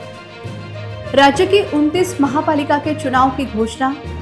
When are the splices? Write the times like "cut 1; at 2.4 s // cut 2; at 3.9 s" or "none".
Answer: cut 1; at 1.1 s